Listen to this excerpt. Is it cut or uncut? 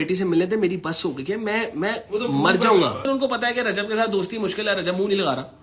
cut